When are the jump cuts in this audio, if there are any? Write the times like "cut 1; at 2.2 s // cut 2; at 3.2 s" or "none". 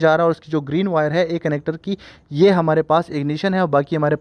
none